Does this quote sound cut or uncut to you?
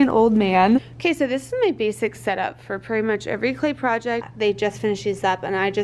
cut